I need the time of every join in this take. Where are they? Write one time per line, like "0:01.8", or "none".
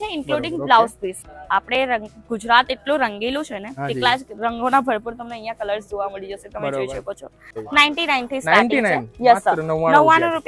0:01.3
0:07.6